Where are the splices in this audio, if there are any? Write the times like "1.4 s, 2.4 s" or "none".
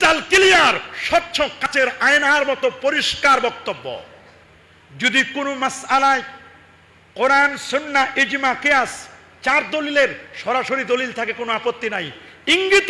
1.7 s

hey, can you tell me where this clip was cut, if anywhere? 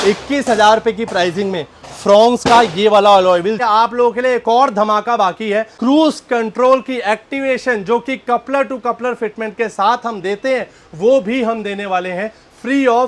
3.6 s, 5.7 s

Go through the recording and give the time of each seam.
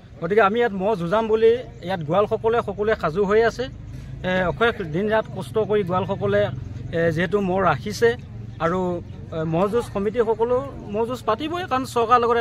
none

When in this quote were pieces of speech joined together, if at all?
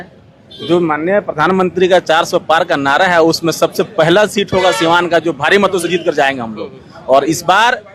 none

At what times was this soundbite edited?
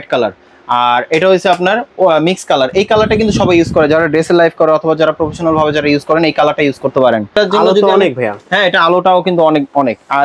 7.3 s

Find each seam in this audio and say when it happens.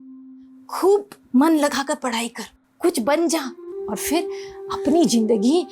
3.7 s

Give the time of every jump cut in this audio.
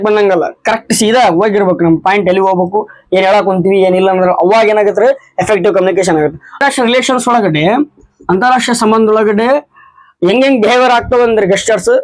6.6 s

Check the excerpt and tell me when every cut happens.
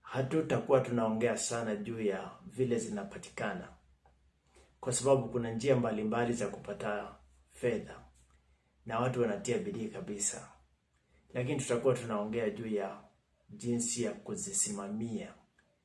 none

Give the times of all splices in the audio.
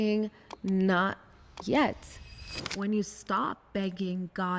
2.3 s

